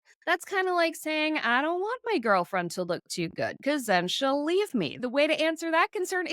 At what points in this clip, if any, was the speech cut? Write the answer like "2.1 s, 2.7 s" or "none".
5.0 s